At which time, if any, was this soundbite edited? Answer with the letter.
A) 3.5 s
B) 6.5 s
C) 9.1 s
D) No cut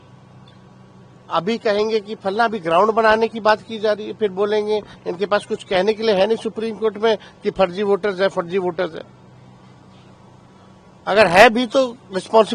D